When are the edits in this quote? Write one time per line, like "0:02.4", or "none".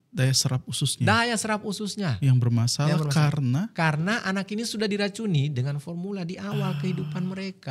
none